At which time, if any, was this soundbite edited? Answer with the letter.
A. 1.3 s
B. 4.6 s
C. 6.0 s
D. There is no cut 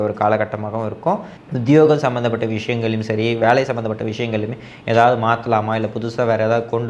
A